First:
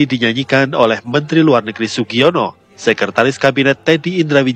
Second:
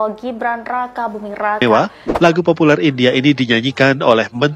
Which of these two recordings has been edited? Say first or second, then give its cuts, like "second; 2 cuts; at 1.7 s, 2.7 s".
second; 1 cut; at 1.6 s